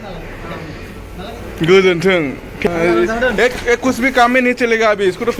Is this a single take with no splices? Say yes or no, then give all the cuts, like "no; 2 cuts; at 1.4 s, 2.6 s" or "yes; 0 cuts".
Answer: no; 1 cut; at 2.6 s